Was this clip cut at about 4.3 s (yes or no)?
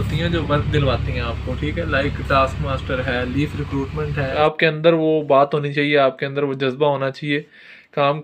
yes